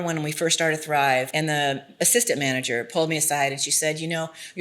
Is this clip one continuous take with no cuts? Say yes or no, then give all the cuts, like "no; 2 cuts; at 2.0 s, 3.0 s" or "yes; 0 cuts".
no; 1 cut; at 1.3 s